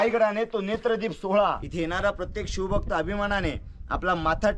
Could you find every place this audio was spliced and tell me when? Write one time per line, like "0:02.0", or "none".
0:01.7